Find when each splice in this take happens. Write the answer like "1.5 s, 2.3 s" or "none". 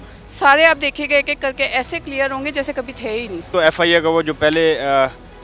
3.5 s